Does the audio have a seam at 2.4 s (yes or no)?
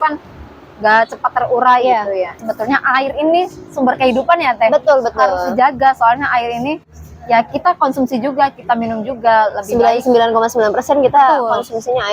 yes